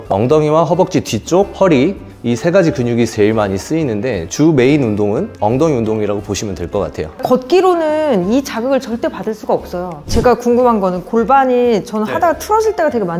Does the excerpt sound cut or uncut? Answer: uncut